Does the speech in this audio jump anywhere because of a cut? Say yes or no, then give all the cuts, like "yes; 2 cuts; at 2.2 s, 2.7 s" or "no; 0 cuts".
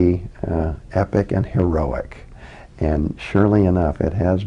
no; 0 cuts